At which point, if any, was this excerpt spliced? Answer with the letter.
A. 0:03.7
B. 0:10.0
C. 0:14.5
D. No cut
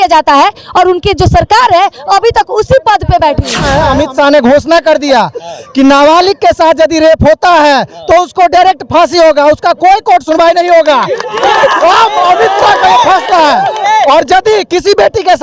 A